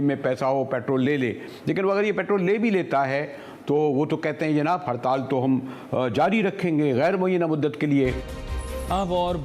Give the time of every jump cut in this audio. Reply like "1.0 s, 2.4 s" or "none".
8.4 s